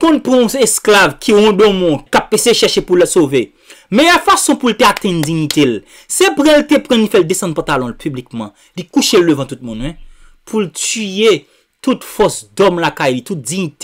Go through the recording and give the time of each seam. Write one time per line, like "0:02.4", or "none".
0:02.0